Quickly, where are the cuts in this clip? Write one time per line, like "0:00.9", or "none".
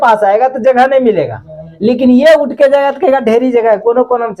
none